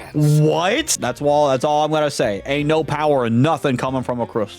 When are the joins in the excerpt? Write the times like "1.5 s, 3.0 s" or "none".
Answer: 0.9 s